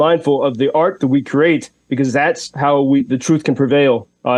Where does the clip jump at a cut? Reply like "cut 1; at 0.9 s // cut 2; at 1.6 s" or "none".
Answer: none